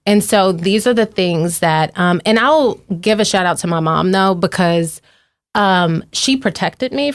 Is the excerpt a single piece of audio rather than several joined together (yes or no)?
yes